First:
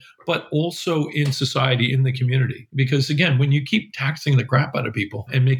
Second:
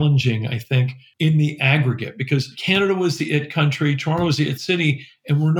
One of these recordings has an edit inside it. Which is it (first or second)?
second